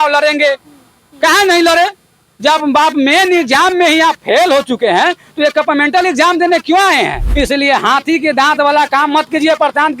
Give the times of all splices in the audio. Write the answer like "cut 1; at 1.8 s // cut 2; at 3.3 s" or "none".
cut 1; at 7.2 s